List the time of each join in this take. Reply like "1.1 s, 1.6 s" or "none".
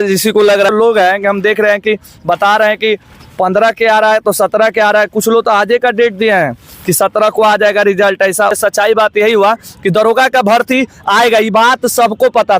0.7 s, 8.5 s